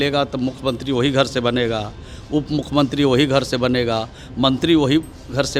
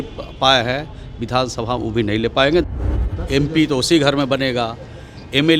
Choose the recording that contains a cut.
second; 1 cut; at 2.7 s

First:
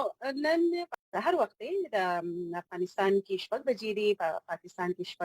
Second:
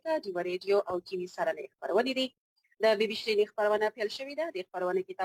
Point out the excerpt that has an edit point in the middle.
first; 1 cut; at 0.9 s

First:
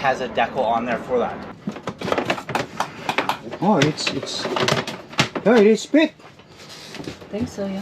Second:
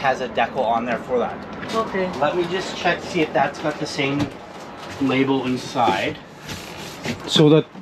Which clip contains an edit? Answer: first; 1 cut; at 1.5 s

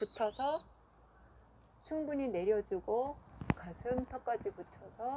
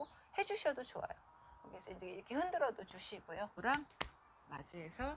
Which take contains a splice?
second; 1 cut; at 3.6 s

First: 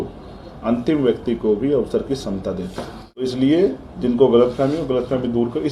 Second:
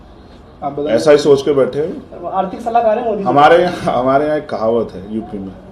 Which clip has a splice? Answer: first; 1 cut; at 3.2 s

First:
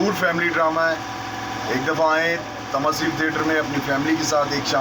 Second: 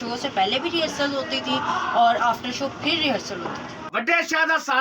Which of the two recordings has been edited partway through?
second; 1 cut; at 3.8 s

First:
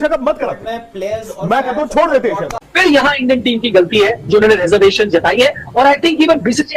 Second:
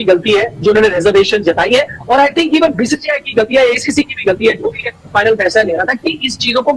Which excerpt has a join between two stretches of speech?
first; 1 cut; at 2.6 s

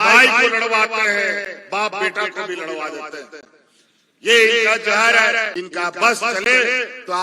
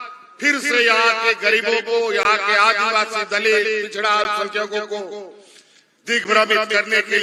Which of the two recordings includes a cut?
first; 1 cut; at 5.5 s

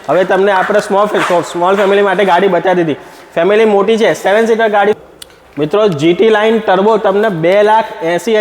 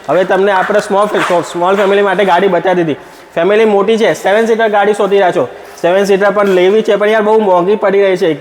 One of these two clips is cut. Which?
first; 1 cut; at 5.0 s

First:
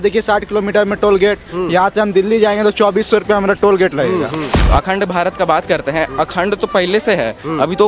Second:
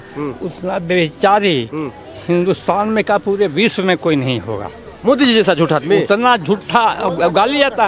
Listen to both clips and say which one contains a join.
first; 1 cut; at 4.5 s

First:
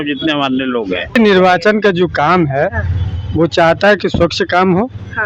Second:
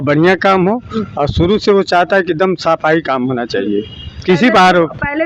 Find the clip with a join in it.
first; 1 cut; at 1.1 s

